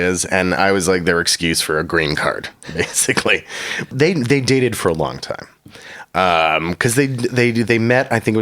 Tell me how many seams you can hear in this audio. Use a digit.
1